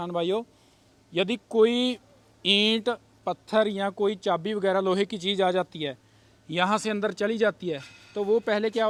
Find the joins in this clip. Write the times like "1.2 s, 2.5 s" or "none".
none